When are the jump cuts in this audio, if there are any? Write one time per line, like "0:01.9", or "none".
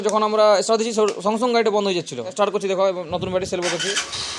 0:02.3